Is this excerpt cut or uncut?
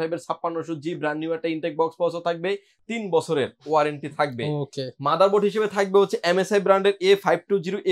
uncut